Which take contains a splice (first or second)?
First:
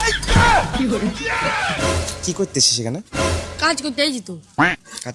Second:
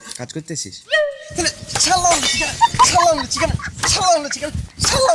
first